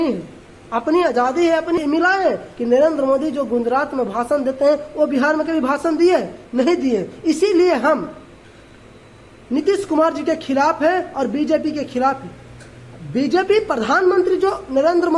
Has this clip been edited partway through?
yes; 1 cut; at 1.8 s

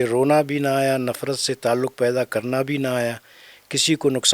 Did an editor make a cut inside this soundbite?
no; 0 cuts

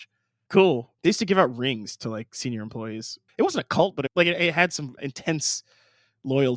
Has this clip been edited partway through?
yes; 4 cuts; at 0.9 s, 3.2 s, 4.1 s, 5.0 s

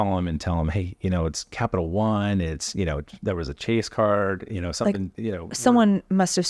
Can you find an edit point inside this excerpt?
no; 0 cuts

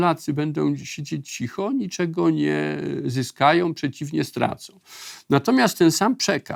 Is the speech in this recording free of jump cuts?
yes; 0 cuts

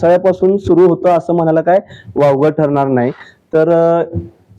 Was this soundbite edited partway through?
no; 0 cuts

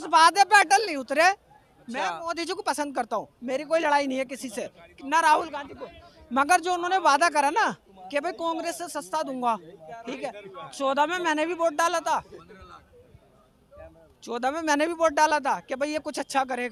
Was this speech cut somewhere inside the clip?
no; 0 cuts

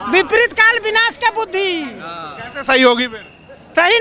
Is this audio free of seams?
yes; 0 cuts

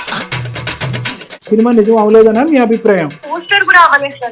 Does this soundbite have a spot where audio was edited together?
yes; 2 cuts; at 1.5 s, 3.2 s

